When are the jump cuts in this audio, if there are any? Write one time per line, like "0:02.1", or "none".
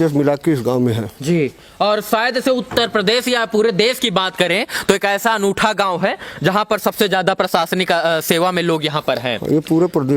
none